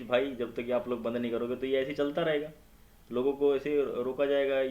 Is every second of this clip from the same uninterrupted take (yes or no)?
yes